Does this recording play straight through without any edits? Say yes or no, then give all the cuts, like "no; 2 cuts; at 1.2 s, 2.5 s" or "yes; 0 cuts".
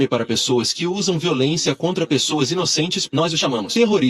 no; 1 cut; at 3.0 s